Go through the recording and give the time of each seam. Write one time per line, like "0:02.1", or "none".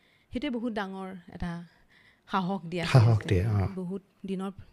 0:03.7